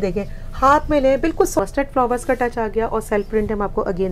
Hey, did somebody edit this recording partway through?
yes; 1 cut; at 1.6 s

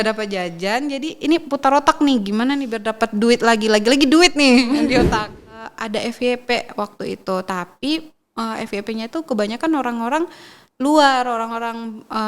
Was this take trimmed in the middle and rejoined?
yes; 1 cut; at 5.6 s

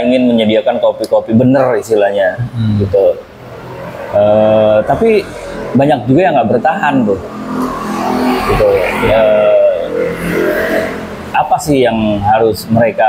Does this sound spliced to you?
no; 0 cuts

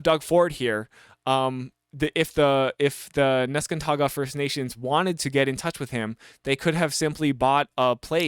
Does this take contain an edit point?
no; 0 cuts

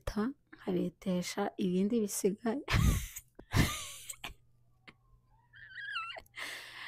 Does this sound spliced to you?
yes; 1 cut; at 3.2 s

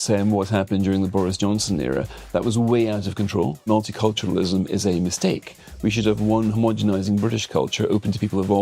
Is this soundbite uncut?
no; 1 cut; at 3.7 s

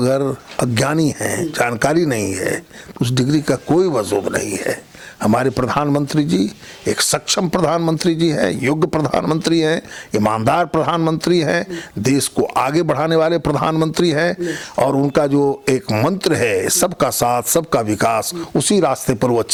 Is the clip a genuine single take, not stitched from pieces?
yes; 0 cuts

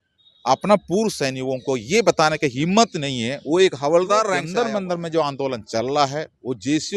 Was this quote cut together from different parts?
yes; 1 cut; at 4.4 s

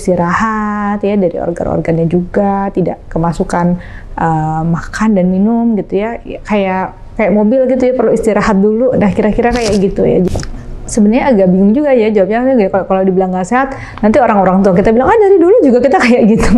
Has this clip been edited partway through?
yes; 1 cut; at 10.3 s

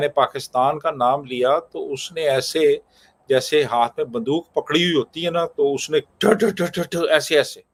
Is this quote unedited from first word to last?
yes; 0 cuts

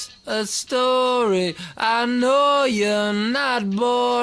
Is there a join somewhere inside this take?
no; 0 cuts

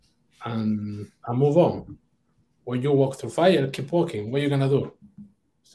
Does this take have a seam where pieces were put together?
no; 0 cuts

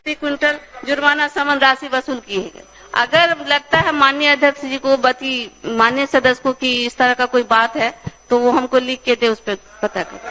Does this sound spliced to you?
no; 0 cuts

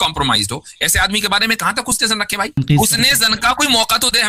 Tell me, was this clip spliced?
yes; 1 cut; at 2.6 s

